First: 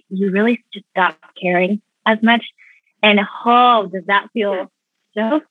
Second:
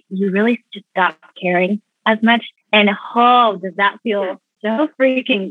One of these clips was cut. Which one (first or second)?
second